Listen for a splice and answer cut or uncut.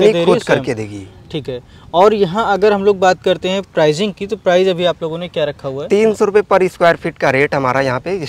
uncut